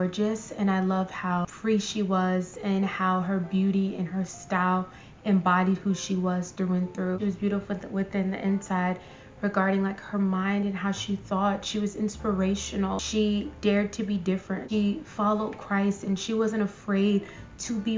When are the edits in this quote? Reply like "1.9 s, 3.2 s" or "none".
7.2 s, 14.6 s